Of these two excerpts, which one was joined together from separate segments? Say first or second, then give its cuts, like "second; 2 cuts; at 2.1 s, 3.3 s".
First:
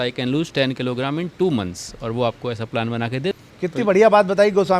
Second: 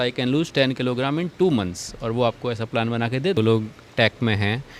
second; 1 cut; at 3.4 s